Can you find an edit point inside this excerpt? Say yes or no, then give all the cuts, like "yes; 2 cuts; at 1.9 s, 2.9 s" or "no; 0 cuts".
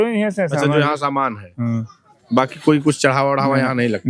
no; 0 cuts